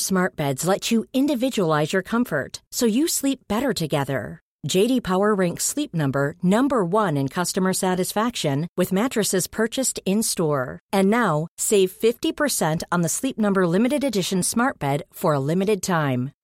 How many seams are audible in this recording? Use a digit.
0